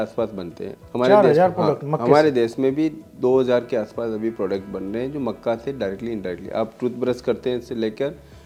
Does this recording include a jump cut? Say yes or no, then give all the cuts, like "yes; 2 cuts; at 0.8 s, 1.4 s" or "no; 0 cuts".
no; 0 cuts